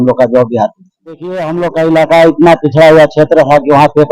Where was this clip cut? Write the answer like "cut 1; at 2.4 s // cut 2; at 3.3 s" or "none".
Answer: cut 1; at 1.4 s